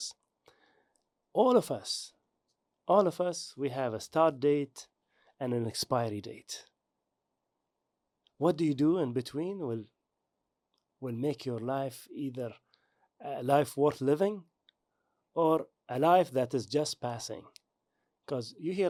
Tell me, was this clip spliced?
no; 0 cuts

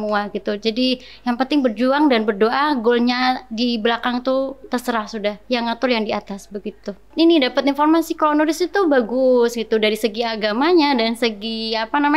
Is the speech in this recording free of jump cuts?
no; 1 cut; at 7.0 s

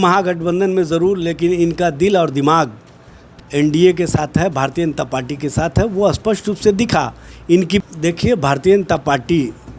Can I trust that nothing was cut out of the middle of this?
no; 1 cut; at 7.8 s

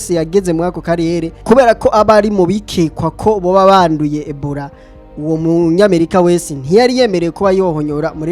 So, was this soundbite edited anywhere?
yes; 1 cut; at 1.3 s

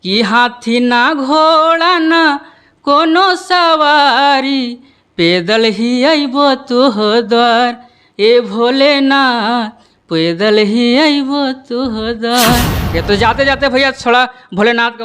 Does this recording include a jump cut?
yes; 1 cut; at 12.9 s

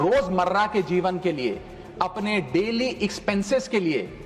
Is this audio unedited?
yes; 0 cuts

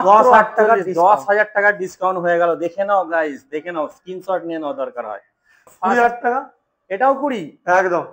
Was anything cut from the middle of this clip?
yes; 1 cut; at 5.6 s

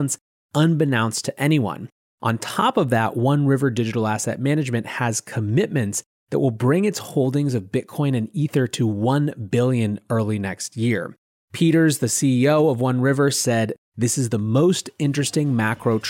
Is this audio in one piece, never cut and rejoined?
no; 1 cut; at 13.8 s

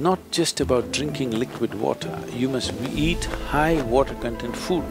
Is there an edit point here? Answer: no; 0 cuts

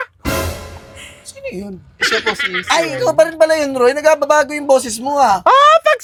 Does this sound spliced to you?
no; 0 cuts

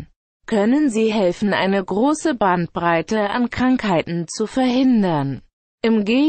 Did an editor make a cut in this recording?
no; 0 cuts

